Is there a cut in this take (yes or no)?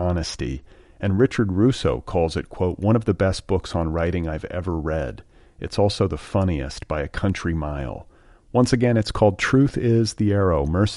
no